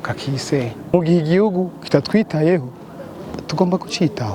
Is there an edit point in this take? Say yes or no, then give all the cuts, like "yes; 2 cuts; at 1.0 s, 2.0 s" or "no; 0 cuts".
yes; 1 cut; at 0.9 s